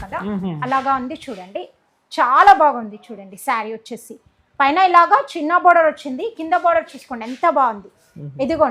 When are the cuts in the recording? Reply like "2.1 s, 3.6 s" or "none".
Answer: none